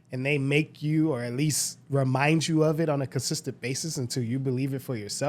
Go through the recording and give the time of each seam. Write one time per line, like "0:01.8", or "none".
none